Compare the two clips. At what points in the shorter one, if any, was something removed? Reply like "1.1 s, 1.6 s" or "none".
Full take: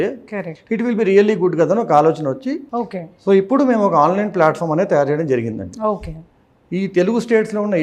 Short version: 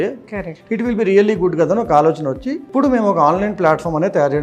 2.7 s